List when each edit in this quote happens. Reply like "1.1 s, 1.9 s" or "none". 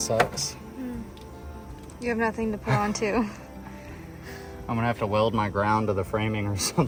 none